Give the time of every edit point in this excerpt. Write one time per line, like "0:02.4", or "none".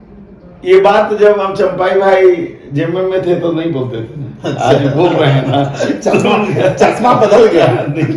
none